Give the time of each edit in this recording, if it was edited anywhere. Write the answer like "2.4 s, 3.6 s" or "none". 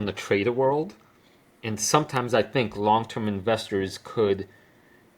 none